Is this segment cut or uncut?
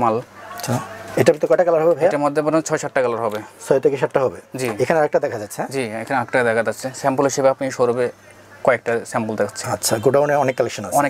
uncut